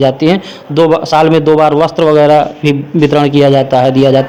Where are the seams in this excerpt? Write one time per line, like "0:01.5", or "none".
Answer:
none